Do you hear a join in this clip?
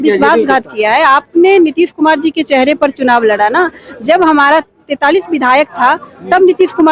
no; 0 cuts

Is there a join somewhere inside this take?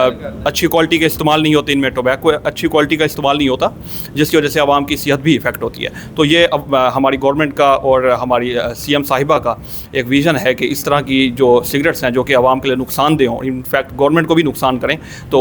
no; 0 cuts

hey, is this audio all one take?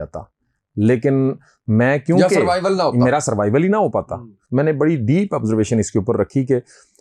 no; 1 cut; at 4.3 s

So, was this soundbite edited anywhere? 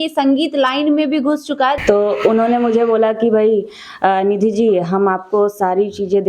yes; 1 cut; at 1.8 s

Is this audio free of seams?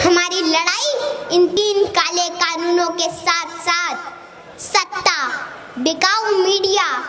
no; 1 cut; at 1.5 s

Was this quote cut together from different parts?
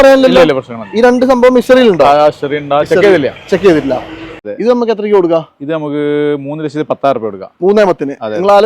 yes; 1 cut; at 4.4 s

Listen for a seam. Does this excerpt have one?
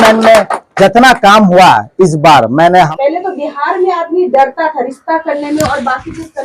yes; 1 cut; at 2.9 s

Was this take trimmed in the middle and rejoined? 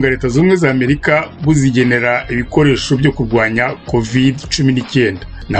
no; 0 cuts

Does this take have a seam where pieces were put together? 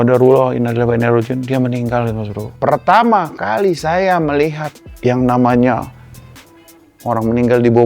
yes; 1 cut; at 2.4 s

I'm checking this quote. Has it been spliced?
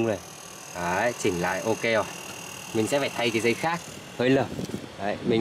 no; 0 cuts

